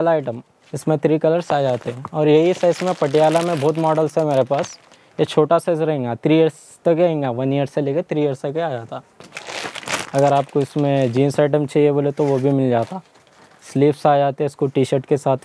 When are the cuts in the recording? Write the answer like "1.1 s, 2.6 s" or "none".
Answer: none